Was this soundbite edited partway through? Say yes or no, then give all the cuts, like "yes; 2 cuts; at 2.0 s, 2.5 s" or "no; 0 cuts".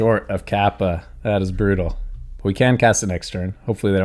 no; 0 cuts